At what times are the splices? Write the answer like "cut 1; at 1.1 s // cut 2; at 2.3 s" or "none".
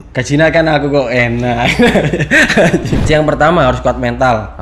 cut 1; at 3.0 s